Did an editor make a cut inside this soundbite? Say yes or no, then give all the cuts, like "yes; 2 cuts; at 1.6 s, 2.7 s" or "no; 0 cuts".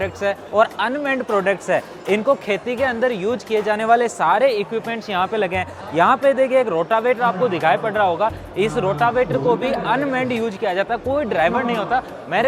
no; 0 cuts